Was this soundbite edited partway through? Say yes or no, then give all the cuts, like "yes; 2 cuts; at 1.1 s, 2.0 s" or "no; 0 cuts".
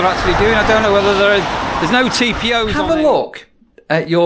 yes; 1 cut; at 2.7 s